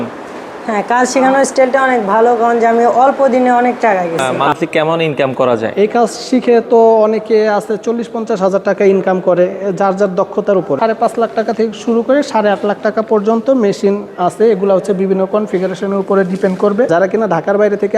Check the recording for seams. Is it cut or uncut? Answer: cut